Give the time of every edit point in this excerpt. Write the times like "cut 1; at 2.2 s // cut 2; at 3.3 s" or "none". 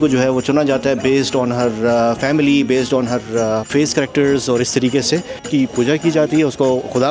cut 1; at 3.7 s // cut 2; at 5.4 s